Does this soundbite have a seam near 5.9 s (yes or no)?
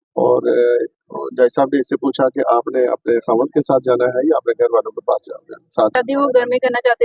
yes